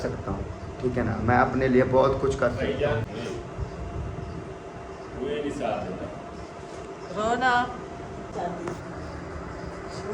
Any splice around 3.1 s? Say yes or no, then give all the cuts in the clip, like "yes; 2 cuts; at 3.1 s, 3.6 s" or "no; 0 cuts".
yes; 2 cuts; at 3.1 s, 8.3 s